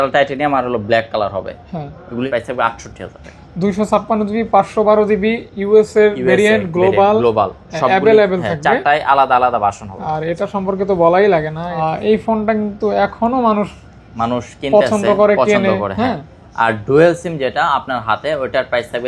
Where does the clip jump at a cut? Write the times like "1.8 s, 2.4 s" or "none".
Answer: 2.3 s, 11.8 s